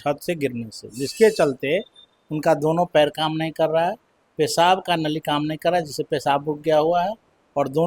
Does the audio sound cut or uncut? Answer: uncut